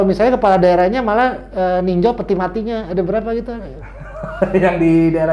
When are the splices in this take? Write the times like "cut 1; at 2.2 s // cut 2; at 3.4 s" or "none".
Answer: none